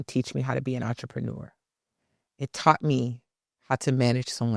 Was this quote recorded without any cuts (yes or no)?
yes